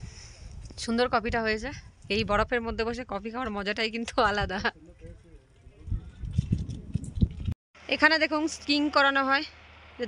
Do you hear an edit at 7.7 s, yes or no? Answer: yes